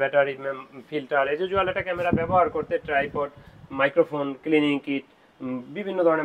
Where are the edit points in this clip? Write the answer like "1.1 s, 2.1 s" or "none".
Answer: none